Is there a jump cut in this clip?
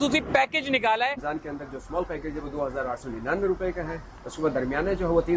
yes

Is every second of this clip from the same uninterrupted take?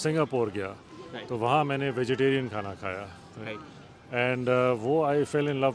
yes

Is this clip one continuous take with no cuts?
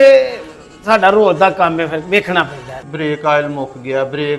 no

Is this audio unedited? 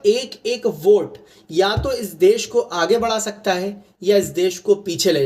yes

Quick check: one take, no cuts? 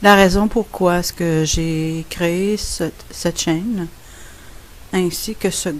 yes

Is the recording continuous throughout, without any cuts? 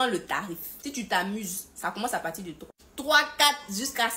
yes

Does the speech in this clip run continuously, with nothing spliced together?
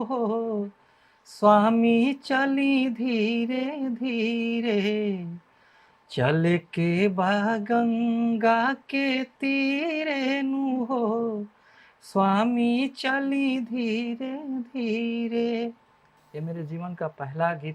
yes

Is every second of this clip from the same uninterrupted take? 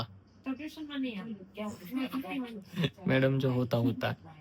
yes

